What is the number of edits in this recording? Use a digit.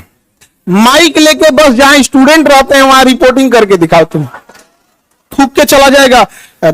1